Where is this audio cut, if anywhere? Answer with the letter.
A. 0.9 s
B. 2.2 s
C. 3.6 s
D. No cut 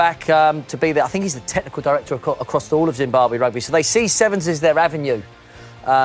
C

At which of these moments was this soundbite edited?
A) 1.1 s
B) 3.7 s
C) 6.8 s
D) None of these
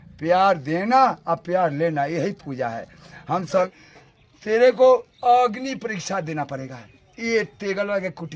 B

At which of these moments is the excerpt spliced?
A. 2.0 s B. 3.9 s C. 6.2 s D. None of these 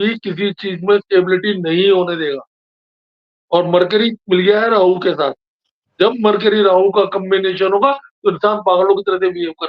D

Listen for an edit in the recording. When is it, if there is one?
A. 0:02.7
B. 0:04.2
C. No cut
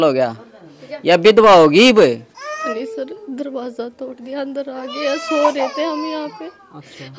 A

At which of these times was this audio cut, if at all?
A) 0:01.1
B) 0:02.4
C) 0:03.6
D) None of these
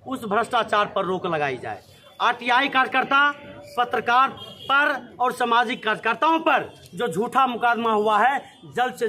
D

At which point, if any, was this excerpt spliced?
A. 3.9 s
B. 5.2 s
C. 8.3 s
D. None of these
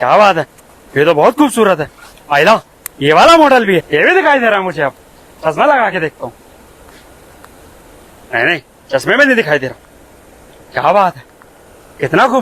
A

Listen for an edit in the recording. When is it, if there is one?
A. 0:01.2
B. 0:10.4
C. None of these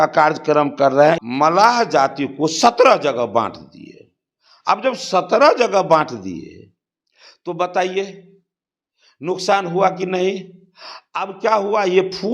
A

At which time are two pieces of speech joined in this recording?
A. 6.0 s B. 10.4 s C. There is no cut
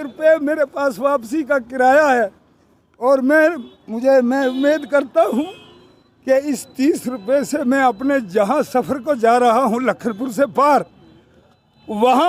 C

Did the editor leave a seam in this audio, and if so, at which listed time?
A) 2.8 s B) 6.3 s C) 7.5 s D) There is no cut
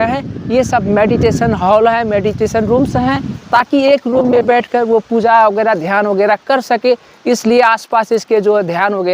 D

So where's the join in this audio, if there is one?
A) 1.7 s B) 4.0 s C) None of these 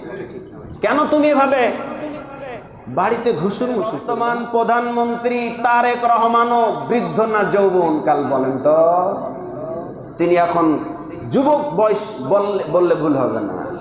B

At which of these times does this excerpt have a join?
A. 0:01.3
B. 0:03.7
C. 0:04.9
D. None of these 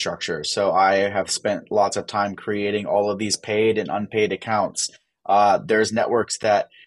D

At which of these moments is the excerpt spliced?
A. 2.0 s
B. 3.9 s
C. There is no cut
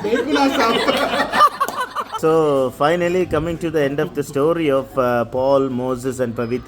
A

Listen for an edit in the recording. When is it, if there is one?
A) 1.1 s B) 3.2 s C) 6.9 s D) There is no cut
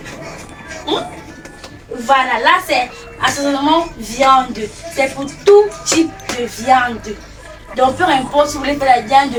D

